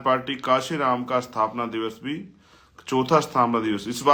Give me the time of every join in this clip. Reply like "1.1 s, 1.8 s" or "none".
none